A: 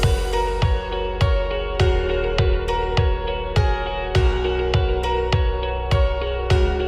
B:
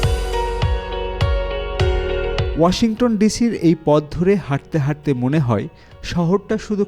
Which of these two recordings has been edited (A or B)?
B